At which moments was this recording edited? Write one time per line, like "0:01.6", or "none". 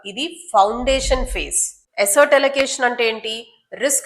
0:01.8